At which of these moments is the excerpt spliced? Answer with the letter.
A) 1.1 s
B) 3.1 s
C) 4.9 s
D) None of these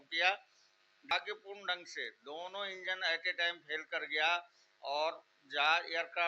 A